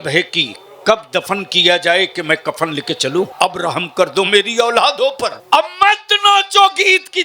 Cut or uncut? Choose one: cut